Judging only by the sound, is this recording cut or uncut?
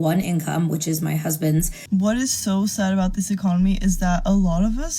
cut